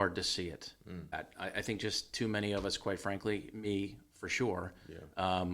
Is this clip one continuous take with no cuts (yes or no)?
no